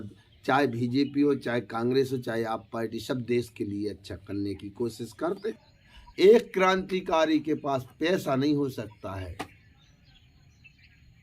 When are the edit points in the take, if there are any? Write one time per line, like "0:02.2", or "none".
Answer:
0:05.5